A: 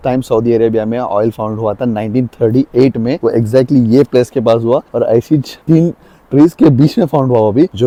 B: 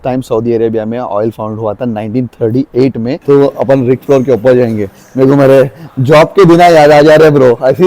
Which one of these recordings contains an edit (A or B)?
B